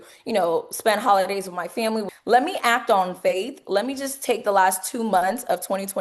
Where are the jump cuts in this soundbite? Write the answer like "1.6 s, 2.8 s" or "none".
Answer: 2.1 s